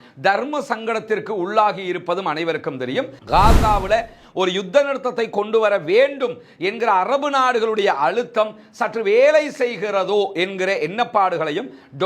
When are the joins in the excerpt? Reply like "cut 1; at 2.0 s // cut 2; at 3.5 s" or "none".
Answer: cut 1; at 3.2 s